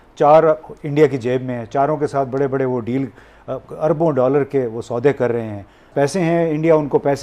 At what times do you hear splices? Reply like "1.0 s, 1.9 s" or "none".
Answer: 5.9 s